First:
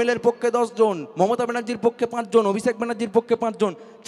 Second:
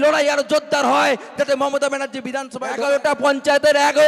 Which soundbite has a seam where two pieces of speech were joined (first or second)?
second